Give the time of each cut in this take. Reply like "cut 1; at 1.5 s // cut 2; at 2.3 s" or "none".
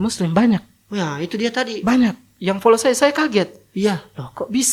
none

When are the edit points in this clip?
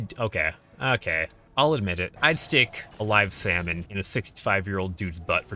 cut 1; at 1.4 s // cut 2; at 2.1 s // cut 3; at 2.8 s // cut 4; at 3.8 s

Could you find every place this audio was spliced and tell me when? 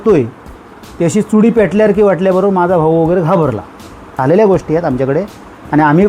cut 1; at 4.2 s

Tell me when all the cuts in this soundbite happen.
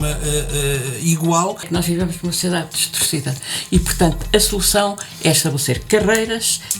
cut 1; at 1.7 s

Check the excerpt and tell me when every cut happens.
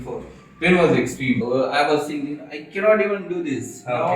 cut 1; at 1.4 s

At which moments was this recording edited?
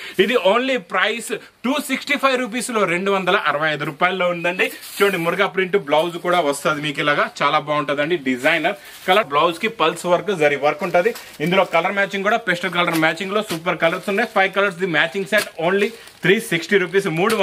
cut 1; at 9.3 s

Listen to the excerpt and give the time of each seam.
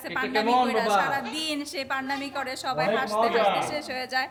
none

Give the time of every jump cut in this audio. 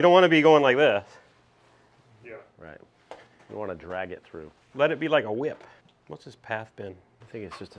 none

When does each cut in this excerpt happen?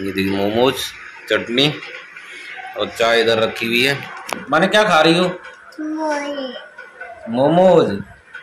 cut 1; at 4.4 s

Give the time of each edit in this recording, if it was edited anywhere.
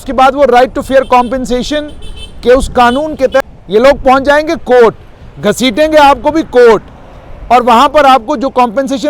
cut 1; at 3.4 s

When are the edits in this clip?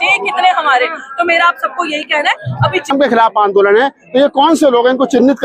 cut 1; at 2.9 s

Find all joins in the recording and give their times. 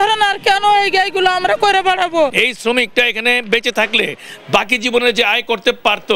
cut 1; at 2.3 s

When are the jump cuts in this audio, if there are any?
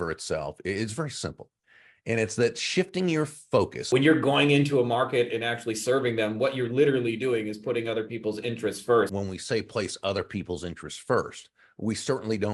cut 1; at 3.8 s // cut 2; at 9.1 s

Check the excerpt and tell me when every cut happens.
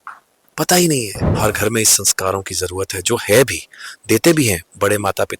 cut 1; at 1.2 s

